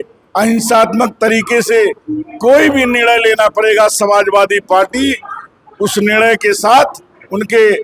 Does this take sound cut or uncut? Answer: uncut